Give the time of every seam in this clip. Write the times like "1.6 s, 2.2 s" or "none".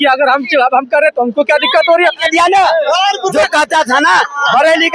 2.2 s